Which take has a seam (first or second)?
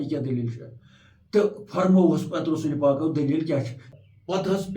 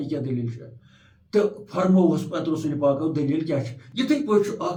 first